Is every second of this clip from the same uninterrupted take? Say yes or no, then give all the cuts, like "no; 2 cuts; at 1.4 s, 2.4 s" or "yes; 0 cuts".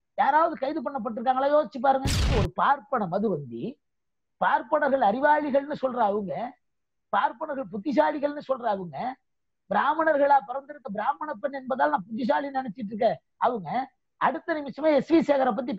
no; 1 cut; at 2.3 s